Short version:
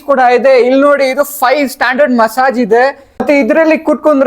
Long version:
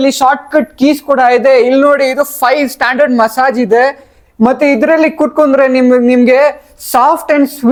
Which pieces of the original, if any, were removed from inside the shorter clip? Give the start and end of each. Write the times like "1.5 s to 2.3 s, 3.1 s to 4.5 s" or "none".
4.2 s to 4.6 s